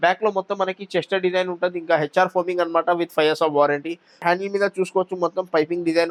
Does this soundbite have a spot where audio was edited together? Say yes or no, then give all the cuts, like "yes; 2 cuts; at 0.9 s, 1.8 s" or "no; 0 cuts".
no; 0 cuts